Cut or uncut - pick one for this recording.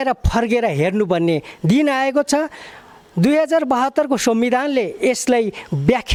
uncut